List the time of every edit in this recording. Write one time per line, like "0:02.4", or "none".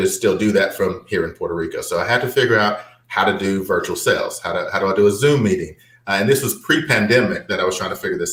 none